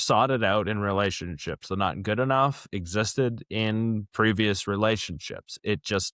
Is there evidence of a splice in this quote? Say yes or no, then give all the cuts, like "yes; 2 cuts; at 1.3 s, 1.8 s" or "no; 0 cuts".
no; 0 cuts